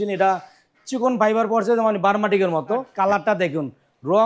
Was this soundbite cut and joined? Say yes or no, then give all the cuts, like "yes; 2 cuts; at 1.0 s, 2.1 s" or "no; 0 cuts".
yes; 1 cut; at 2.9 s